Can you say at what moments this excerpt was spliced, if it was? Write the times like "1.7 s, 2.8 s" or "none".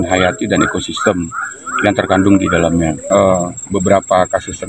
3.0 s